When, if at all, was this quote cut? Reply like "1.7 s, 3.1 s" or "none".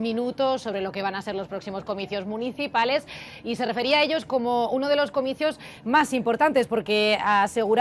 3.3 s